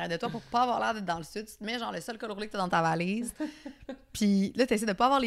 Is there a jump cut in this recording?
no; 0 cuts

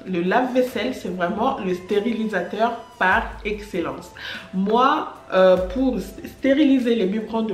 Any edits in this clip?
no; 0 cuts

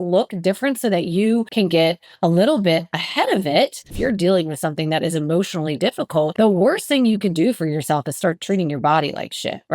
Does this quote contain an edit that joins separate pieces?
yes; 3 cuts; at 1.5 s, 3.9 s, 6.3 s

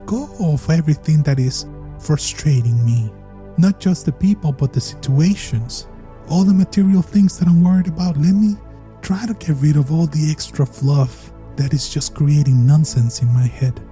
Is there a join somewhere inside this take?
no; 0 cuts

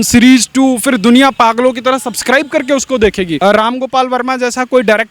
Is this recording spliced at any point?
yes; 1 cut; at 3.3 s

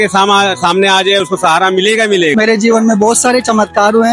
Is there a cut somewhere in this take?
yes; 1 cut; at 2.3 s

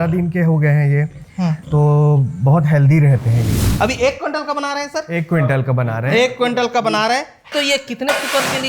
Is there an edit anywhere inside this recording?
yes; 2 cuts; at 3.5 s, 7.5 s

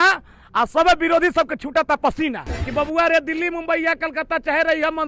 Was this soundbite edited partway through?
yes; 1 cut; at 2.5 s

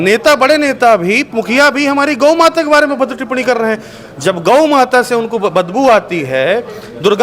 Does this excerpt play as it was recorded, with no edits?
yes; 0 cuts

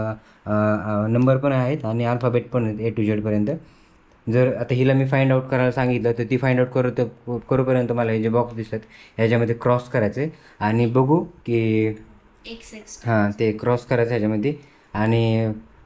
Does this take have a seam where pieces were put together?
no; 0 cuts

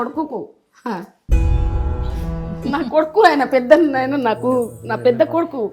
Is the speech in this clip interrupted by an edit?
no; 0 cuts

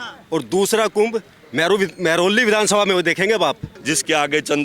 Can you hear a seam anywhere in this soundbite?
yes; 1 cut; at 3.7 s

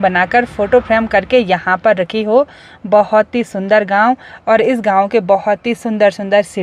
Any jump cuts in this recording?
no; 0 cuts

